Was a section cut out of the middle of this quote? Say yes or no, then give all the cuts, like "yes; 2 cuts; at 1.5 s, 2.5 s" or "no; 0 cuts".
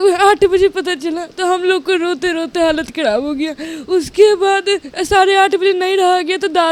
no; 0 cuts